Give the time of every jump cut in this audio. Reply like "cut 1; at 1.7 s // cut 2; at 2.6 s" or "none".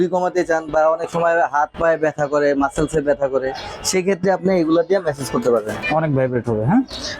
cut 1; at 5.7 s